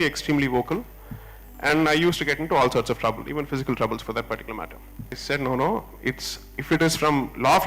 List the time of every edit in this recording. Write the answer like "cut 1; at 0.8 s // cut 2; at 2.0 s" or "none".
cut 1; at 5.2 s